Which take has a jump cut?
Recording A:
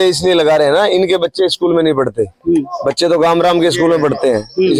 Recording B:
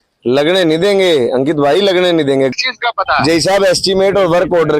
B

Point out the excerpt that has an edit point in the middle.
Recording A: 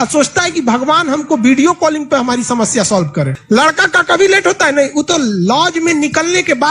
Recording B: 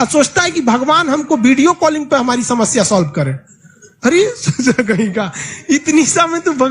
A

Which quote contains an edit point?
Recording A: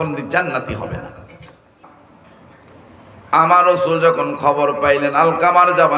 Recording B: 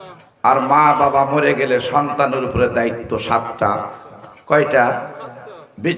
A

